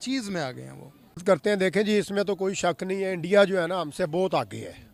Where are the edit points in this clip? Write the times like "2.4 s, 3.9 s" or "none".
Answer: none